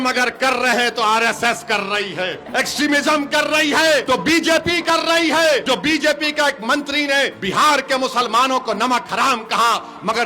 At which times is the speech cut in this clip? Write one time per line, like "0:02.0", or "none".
0:02.4
0:04.0
0:05.6
0:07.4